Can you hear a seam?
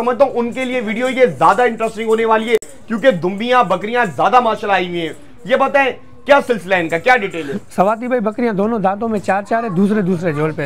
no; 0 cuts

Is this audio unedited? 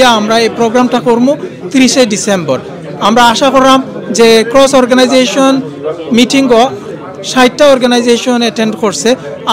yes; 0 cuts

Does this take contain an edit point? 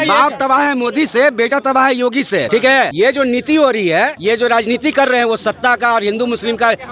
yes; 2 cuts; at 2.8 s, 4.2 s

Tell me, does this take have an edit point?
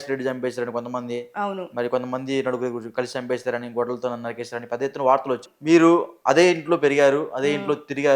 yes; 1 cut; at 5.5 s

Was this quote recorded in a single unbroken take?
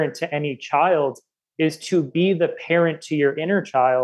yes; 0 cuts

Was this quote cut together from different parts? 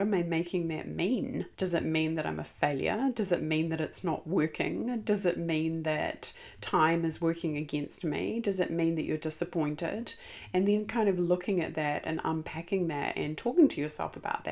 yes; 1 cut; at 1.5 s

